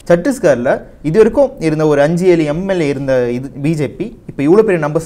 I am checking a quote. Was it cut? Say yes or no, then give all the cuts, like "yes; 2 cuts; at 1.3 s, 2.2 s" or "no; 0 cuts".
no; 0 cuts